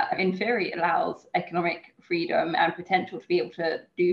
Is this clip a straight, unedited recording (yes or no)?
yes